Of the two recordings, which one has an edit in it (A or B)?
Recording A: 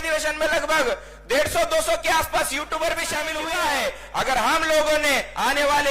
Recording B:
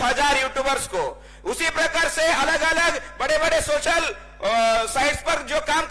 A